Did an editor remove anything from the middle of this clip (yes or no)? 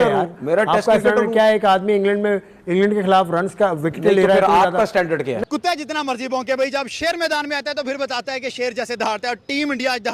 yes